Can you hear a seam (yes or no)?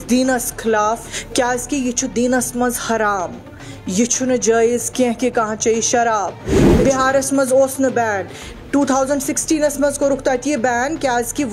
yes